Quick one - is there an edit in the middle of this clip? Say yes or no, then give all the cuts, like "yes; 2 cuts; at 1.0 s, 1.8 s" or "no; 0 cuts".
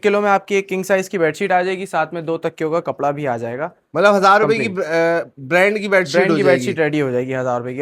no; 0 cuts